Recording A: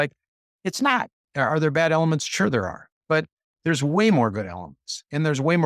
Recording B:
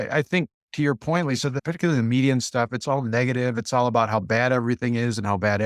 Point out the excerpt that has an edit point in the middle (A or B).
B